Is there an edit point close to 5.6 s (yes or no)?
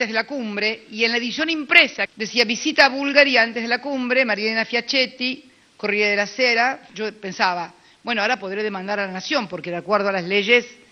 no